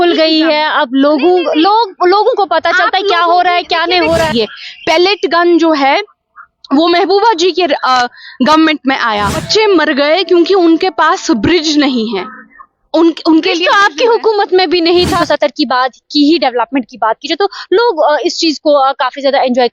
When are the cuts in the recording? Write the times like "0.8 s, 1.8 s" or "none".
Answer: 4.3 s, 9.4 s, 15.2 s